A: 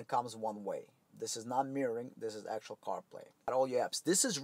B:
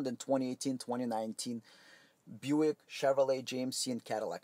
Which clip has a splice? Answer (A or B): A